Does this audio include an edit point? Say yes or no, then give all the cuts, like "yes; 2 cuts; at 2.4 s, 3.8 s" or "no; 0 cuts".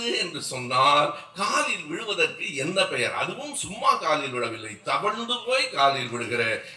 no; 0 cuts